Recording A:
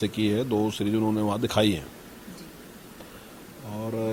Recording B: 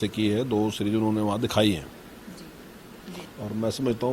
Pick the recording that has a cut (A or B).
B